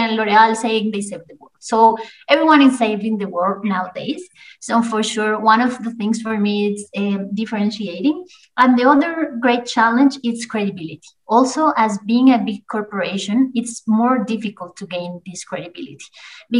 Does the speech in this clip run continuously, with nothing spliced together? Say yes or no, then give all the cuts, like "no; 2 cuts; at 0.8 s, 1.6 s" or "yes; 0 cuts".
yes; 0 cuts